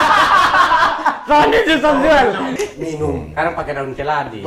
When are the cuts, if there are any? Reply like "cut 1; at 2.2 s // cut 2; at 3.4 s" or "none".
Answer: cut 1; at 2.5 s